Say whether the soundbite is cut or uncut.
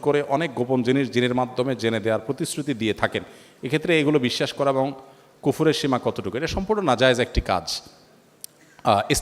uncut